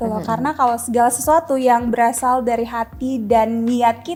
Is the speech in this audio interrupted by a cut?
no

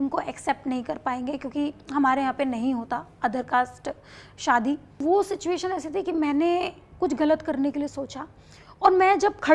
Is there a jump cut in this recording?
yes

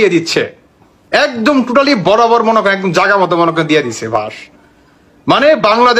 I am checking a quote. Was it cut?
no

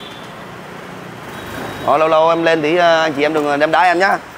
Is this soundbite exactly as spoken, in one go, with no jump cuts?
yes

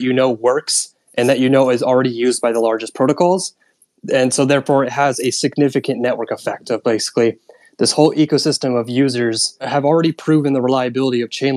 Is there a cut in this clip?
yes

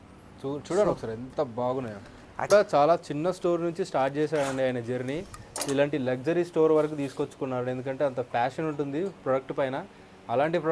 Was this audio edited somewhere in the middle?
yes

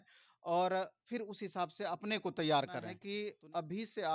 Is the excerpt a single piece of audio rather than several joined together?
no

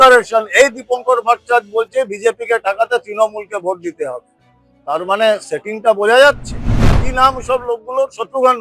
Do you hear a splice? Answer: yes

